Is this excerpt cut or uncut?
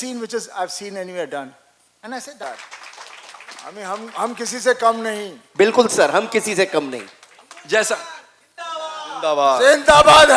cut